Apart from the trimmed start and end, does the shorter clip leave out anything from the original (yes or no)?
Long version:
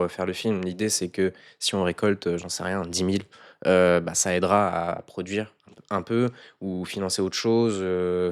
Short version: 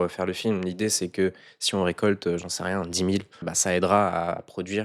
yes